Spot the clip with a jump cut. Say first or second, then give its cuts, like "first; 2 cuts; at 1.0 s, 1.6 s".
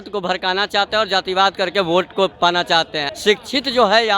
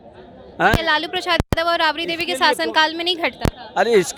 first; 1 cut; at 3.0 s